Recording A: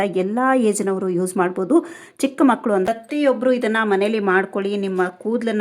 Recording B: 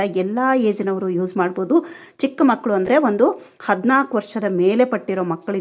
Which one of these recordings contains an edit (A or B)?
A